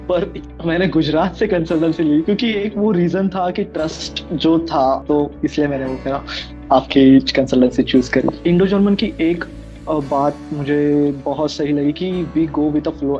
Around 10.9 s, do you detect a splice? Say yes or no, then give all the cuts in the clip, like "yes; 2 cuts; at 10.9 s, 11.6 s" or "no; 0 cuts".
no; 3 cuts; at 2.2 s, 5.0 s, 8.4 s